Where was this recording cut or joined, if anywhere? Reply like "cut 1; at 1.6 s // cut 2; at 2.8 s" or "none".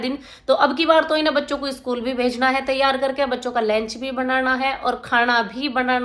none